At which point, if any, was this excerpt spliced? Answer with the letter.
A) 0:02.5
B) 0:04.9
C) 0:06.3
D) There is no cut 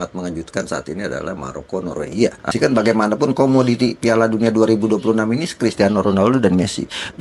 A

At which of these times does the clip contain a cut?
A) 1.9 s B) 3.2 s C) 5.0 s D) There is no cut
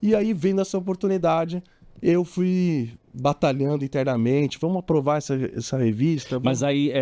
D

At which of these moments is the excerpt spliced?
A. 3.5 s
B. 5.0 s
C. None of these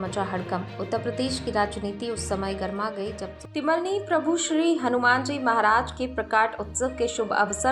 A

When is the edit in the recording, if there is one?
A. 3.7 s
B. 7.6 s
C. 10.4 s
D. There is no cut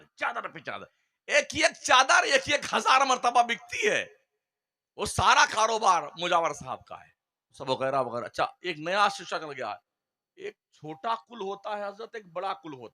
B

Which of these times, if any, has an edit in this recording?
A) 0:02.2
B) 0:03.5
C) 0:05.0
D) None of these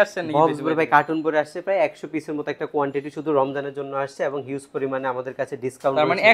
D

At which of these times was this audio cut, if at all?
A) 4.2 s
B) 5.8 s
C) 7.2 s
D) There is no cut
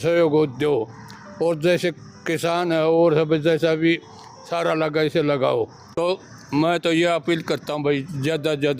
B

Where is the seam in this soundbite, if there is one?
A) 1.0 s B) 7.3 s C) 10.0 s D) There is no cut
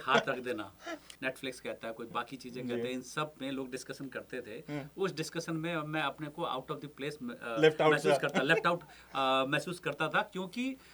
A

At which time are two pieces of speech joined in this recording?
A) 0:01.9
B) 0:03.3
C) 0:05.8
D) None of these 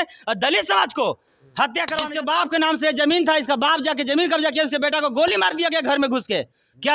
A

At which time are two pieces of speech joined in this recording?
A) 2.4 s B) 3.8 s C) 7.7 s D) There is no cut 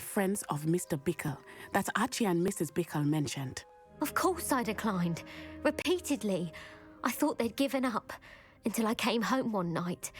B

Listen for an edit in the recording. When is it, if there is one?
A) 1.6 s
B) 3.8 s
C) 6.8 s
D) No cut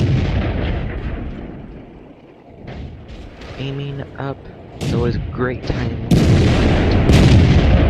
C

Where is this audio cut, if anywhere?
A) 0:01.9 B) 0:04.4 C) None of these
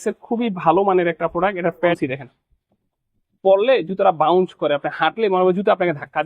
A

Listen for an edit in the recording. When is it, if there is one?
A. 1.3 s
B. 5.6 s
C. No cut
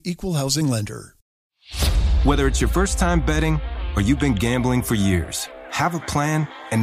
A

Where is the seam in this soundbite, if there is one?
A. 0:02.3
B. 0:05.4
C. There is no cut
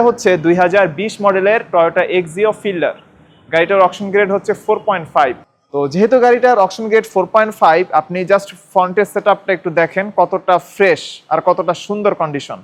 B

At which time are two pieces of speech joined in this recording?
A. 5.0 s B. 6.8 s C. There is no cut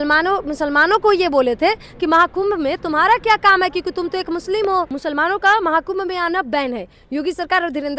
A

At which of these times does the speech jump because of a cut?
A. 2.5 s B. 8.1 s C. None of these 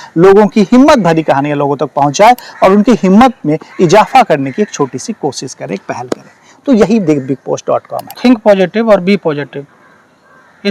B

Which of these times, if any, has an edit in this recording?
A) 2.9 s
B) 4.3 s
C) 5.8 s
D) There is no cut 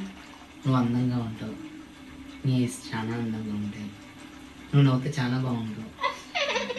D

